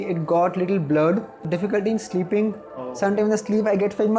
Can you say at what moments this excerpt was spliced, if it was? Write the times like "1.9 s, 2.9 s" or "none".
1.4 s